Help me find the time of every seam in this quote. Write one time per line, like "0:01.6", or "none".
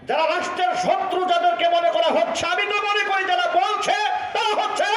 none